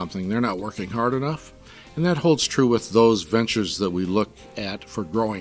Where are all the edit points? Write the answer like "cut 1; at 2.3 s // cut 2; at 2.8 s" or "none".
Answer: cut 1; at 4.5 s

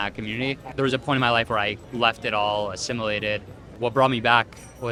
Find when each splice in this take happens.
none

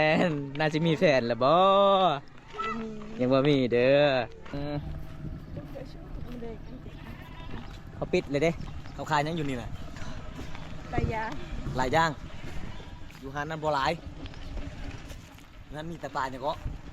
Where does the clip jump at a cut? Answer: cut 1; at 4.5 s

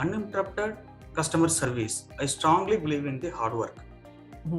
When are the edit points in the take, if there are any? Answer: cut 1; at 1.7 s

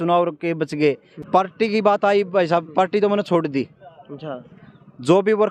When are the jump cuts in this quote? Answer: cut 1; at 1.1 s

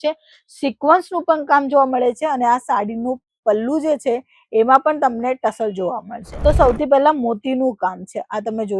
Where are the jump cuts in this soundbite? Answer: cut 1; at 6.2 s

